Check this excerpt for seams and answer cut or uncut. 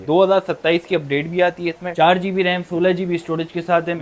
cut